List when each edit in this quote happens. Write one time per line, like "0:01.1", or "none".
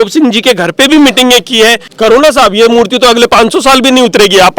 0:01.9